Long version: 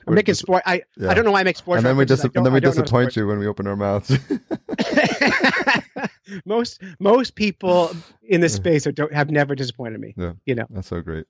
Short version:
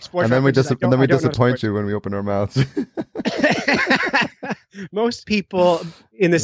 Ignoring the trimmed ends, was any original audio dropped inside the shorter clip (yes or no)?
yes